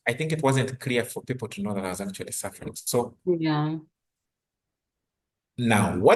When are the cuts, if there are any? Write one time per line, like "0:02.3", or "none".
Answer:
none